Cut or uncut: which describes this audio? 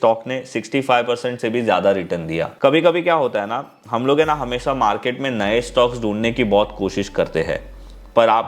cut